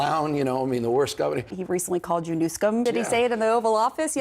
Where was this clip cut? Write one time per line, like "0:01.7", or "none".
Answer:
0:01.5
0:02.8